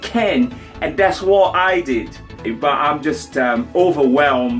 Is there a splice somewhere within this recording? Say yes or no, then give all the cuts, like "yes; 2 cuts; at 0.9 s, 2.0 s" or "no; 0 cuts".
yes; 1 cut; at 2.5 s